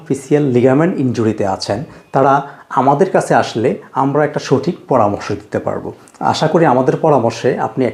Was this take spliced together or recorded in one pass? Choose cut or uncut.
uncut